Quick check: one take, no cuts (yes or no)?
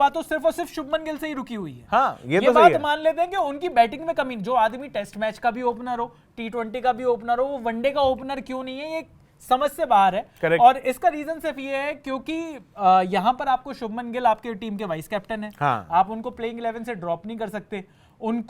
yes